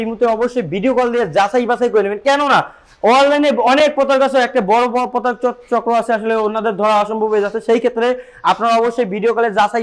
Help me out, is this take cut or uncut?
uncut